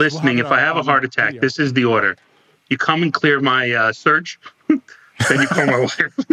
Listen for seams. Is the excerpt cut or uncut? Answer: uncut